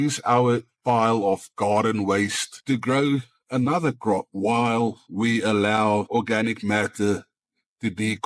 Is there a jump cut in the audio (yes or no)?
yes